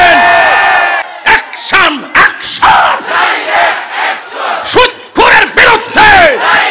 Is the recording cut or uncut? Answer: cut